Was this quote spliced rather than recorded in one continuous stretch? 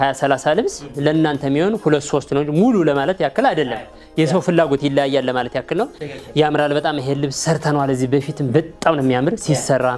no; 0 cuts

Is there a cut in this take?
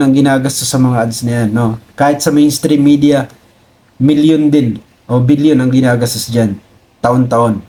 no; 0 cuts

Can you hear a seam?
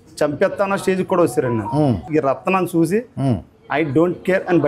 yes; 1 cut; at 2.0 s

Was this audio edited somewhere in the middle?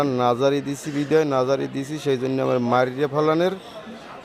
no; 0 cuts

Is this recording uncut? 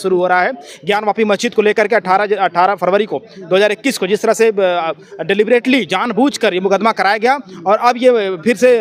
yes; 0 cuts

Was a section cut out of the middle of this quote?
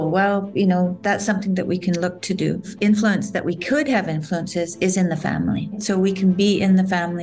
yes; 2 cuts; at 2.7 s, 5.8 s

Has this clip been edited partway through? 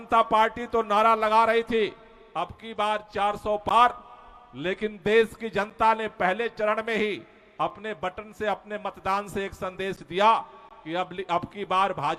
no; 0 cuts

